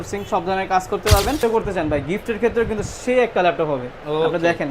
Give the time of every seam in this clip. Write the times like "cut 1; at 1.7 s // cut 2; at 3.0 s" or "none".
cut 1; at 1.4 s